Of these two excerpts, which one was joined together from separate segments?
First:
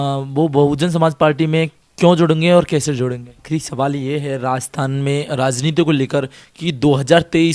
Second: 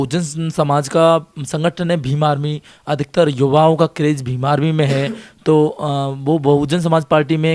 first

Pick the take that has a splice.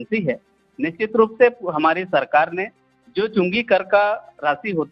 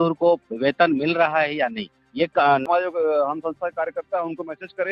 second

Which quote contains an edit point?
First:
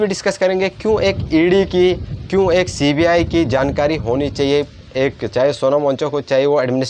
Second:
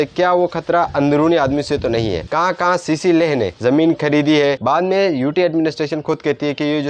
second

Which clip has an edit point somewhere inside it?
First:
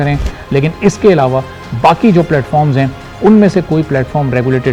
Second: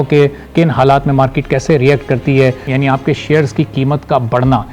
second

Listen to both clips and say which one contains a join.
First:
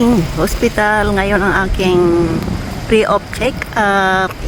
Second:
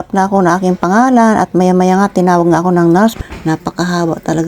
second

